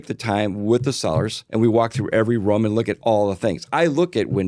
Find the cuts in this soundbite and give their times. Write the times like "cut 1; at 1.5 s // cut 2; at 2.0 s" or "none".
cut 1; at 1.4 s